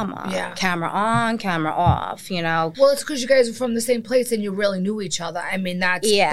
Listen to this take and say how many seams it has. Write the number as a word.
one